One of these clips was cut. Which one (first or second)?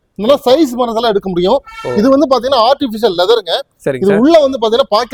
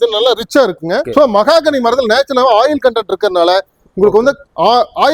second